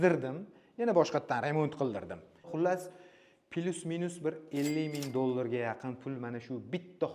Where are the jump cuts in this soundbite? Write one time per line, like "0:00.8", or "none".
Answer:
0:02.4